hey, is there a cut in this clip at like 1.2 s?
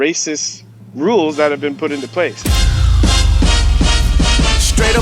no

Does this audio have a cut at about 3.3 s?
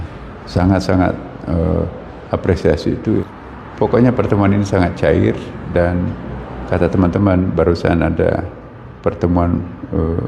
yes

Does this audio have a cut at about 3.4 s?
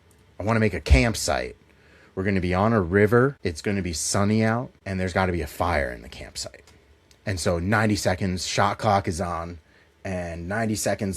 yes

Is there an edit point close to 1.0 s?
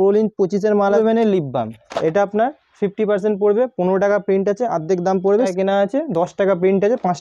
yes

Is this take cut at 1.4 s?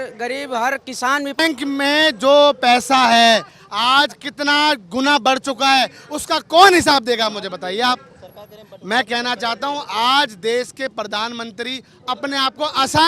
yes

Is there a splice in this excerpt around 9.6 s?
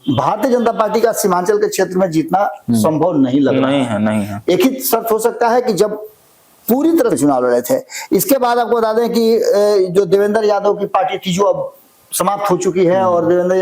no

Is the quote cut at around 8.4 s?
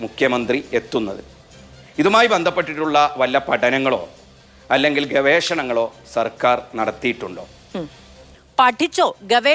yes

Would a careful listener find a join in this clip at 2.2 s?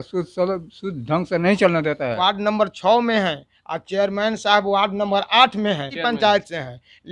yes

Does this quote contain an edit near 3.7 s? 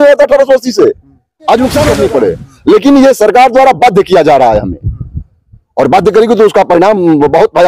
no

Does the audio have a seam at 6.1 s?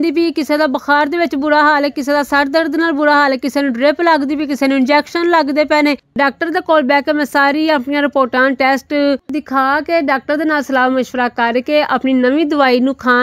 yes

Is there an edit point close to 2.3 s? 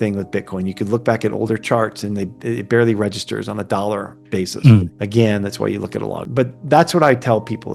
no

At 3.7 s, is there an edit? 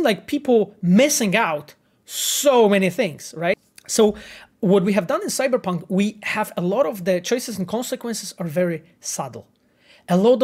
yes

